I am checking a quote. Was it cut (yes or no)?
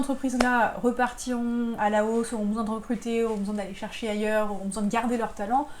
yes